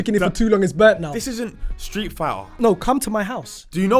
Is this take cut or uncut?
cut